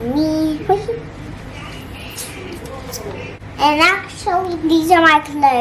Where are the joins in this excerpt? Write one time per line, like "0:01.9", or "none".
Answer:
0:03.4